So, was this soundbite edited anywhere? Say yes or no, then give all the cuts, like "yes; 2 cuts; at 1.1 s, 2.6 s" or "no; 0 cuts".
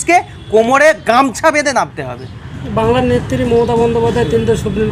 no; 0 cuts